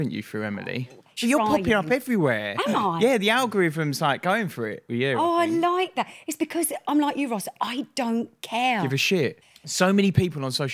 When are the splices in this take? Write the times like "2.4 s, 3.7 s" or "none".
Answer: 1.1 s, 9.4 s